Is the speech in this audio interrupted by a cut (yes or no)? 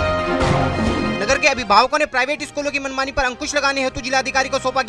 yes